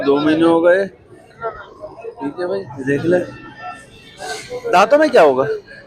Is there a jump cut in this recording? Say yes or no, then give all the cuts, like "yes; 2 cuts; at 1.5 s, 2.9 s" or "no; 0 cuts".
yes; 1 cut; at 2.7 s